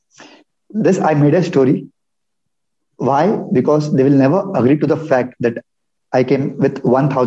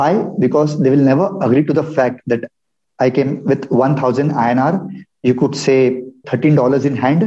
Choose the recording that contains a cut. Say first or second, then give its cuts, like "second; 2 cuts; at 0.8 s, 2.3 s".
second; 1 cut; at 6.2 s